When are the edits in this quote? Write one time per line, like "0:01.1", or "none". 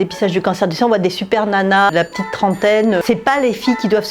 0:01.9
0:03.0